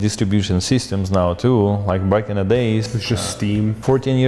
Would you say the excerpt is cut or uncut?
uncut